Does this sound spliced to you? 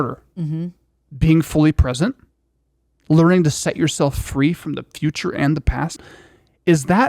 yes; 1 cut; at 6.0 s

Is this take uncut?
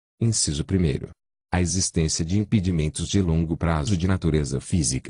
no; 1 cut; at 1.5 s

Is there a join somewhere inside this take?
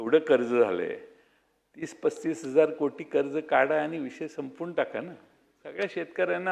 no; 0 cuts

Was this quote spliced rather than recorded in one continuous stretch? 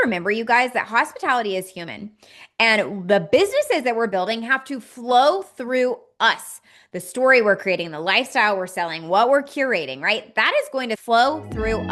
yes; 1 cut; at 11.0 s

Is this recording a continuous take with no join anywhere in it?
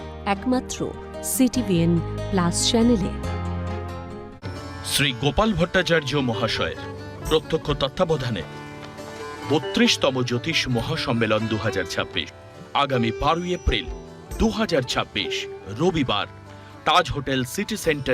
no; 1 cut; at 4.4 s

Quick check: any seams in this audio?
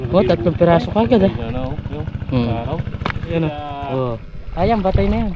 yes; 1 cut; at 3.3 s

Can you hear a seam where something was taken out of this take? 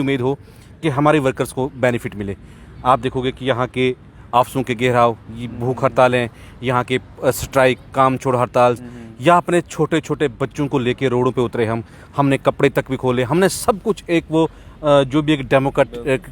no; 0 cuts

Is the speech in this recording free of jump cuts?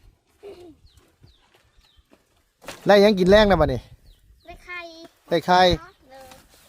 yes; 0 cuts

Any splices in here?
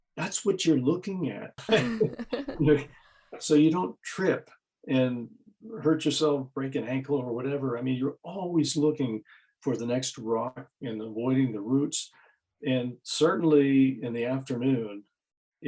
yes; 1 cut; at 1.6 s

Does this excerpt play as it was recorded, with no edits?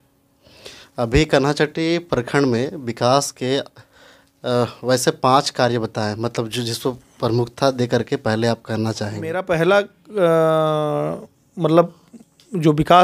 no; 1 cut; at 9.4 s

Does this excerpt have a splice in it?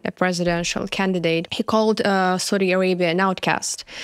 yes; 1 cut; at 1.5 s

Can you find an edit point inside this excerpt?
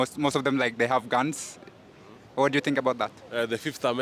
no; 0 cuts

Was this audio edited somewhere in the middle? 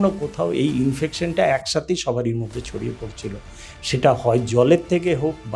no; 0 cuts

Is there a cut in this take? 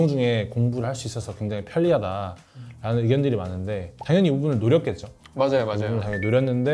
no; 0 cuts

